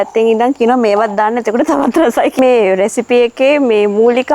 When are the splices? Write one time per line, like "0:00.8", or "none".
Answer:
0:02.4